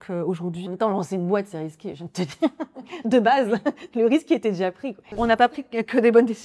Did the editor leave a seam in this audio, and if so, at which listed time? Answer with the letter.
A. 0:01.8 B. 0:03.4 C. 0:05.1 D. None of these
C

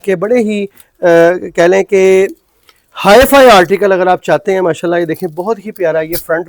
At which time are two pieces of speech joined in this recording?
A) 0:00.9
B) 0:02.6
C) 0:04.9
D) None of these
D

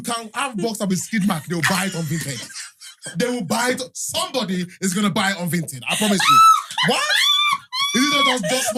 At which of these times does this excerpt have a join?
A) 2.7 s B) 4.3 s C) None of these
C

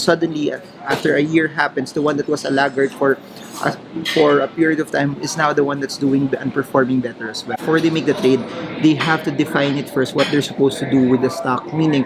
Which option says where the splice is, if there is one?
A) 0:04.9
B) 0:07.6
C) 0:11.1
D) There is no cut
B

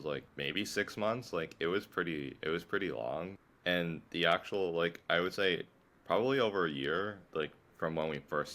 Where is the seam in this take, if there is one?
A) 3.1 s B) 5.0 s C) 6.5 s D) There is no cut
D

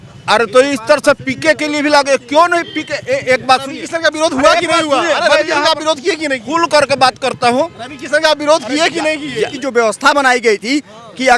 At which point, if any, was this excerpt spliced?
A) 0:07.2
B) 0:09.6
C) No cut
B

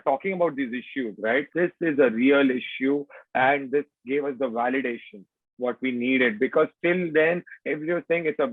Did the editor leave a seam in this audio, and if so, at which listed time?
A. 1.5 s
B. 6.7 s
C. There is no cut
A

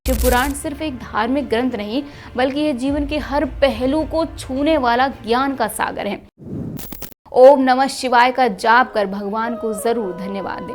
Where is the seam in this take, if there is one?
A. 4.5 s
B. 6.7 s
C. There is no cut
B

